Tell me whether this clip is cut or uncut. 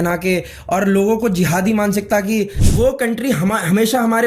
cut